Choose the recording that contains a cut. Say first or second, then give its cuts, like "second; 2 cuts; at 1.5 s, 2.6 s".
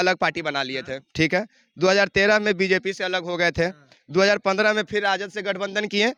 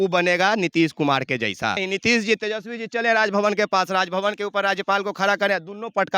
second; 1 cut; at 1.8 s